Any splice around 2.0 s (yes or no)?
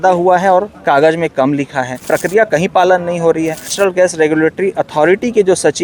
yes